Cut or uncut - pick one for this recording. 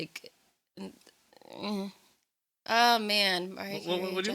uncut